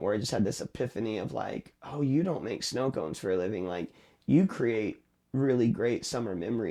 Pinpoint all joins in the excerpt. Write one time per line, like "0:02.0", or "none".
none